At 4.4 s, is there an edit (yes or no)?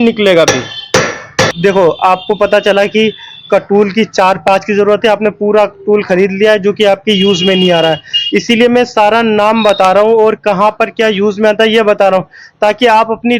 no